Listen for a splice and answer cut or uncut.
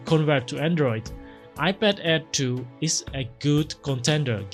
uncut